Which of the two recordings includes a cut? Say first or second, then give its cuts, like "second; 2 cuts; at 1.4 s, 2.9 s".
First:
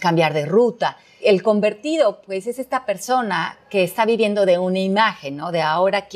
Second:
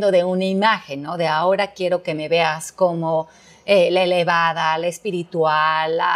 first; 1 cut; at 1.1 s